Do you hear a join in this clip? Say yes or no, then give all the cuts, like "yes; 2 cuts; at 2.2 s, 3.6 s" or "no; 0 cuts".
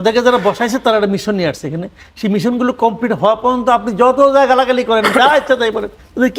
no; 0 cuts